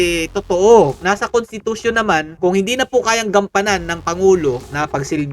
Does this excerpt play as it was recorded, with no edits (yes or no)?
no